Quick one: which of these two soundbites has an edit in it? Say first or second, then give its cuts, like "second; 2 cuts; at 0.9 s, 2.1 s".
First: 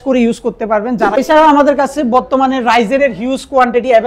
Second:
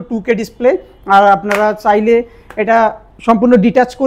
first; 1 cut; at 1.1 s